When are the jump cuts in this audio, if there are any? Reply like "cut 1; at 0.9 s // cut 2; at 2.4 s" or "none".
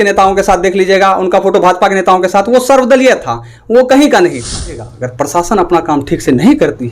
cut 1; at 5.0 s